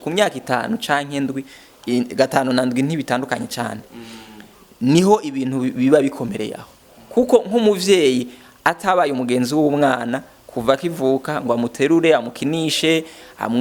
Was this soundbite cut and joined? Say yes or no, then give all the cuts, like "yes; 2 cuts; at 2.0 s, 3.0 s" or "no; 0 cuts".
no; 0 cuts